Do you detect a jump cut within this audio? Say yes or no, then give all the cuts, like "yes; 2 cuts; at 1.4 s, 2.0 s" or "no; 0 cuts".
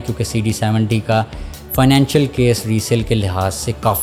no; 0 cuts